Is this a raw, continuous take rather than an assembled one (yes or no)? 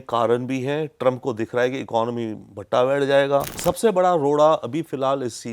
no